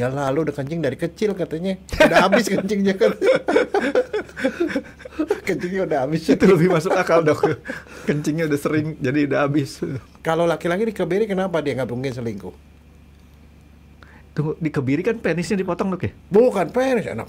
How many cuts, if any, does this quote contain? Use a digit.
1